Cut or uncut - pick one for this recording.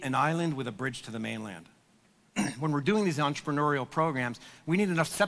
uncut